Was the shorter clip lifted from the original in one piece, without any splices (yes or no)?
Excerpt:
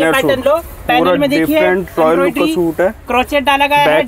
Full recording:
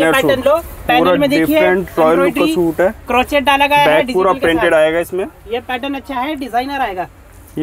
yes